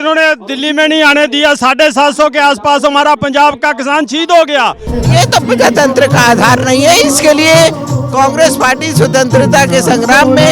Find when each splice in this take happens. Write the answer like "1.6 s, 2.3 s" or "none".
4.9 s